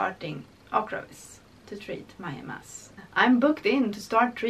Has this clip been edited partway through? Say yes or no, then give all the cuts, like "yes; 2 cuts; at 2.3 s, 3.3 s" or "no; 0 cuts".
yes; 1 cut; at 2.9 s